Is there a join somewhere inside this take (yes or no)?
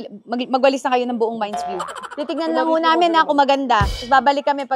no